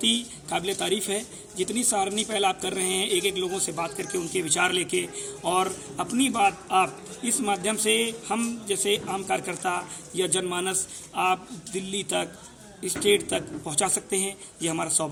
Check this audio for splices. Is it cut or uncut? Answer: uncut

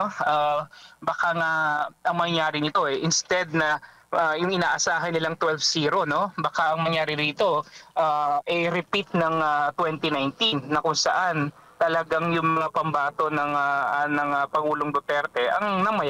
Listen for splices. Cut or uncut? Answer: uncut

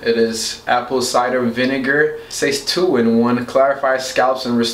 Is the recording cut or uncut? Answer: uncut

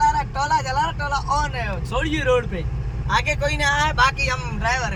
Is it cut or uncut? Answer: uncut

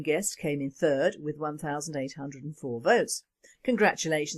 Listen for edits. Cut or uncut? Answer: cut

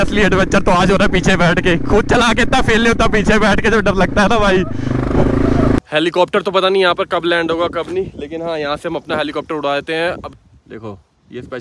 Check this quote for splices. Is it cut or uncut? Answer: cut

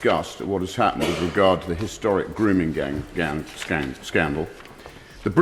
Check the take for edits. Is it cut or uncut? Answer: uncut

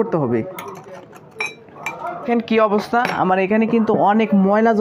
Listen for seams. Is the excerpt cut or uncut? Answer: cut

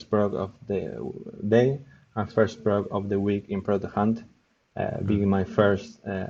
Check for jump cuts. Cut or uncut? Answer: uncut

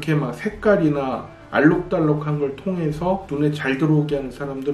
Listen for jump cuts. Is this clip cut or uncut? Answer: uncut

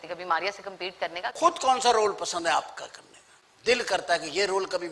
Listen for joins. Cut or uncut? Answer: uncut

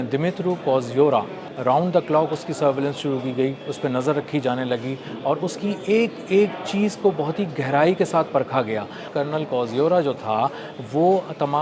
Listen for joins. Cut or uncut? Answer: cut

